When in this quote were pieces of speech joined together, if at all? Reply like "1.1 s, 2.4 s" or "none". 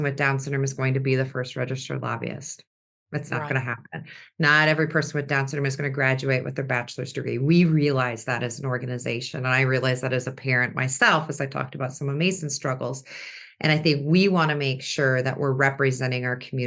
none